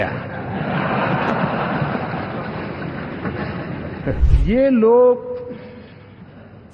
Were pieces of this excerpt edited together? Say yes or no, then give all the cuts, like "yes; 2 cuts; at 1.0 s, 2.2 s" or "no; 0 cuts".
yes; 1 cut; at 4.2 s